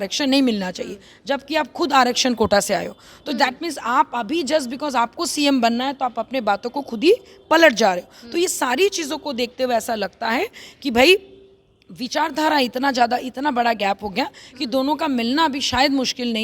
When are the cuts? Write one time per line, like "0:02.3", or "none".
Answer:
none